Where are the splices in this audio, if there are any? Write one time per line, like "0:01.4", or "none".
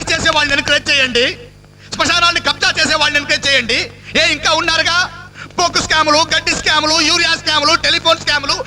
none